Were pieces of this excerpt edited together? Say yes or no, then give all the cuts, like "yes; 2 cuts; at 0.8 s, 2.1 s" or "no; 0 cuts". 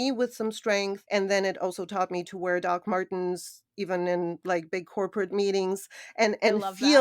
yes; 1 cut; at 1.0 s